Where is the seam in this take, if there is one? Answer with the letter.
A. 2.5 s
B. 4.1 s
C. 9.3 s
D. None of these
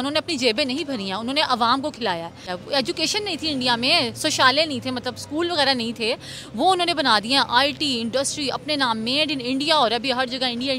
A